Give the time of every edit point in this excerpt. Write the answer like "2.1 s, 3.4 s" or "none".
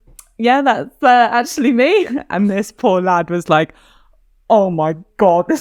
none